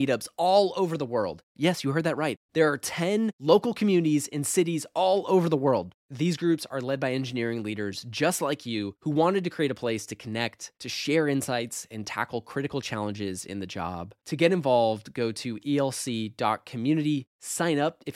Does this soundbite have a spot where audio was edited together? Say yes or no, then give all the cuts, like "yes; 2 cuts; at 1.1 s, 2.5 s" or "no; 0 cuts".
no; 0 cuts